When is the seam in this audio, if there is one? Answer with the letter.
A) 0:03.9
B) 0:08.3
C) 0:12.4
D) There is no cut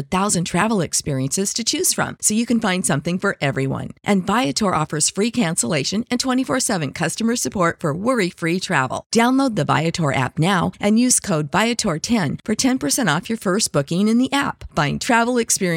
D